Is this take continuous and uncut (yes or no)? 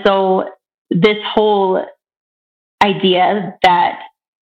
yes